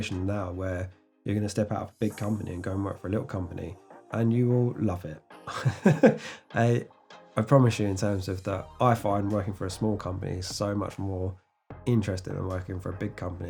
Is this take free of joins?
yes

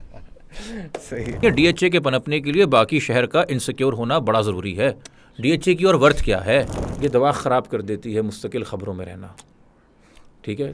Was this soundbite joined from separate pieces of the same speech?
yes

